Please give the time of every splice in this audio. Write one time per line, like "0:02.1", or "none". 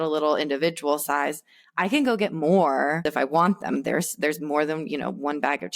0:03.0